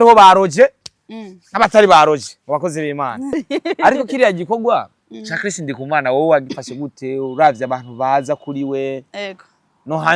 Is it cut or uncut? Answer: cut